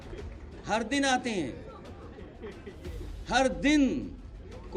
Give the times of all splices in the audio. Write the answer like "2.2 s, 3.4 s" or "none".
none